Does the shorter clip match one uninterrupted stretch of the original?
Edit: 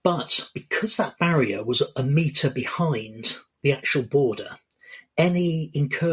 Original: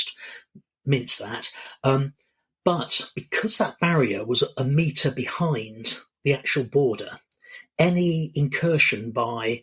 yes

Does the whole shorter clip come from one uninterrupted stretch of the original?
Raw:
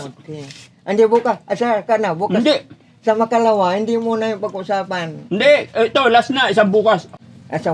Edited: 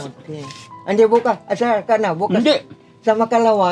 yes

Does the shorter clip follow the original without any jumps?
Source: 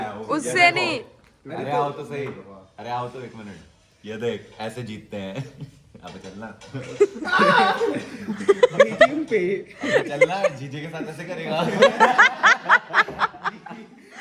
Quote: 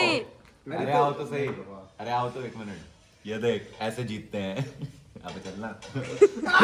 yes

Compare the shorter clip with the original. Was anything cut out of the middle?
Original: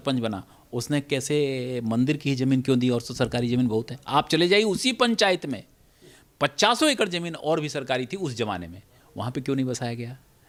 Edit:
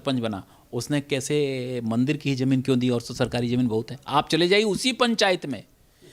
no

